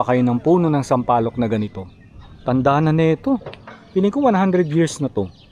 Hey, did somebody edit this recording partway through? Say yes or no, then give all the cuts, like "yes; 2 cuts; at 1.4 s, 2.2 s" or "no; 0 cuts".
no; 0 cuts